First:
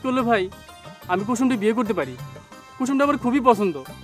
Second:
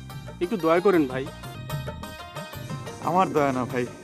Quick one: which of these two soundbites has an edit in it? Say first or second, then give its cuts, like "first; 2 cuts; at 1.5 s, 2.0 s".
second; 1 cut; at 1.6 s